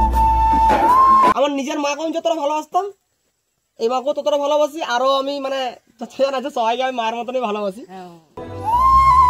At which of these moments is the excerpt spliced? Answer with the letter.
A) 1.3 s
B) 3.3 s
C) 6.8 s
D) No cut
A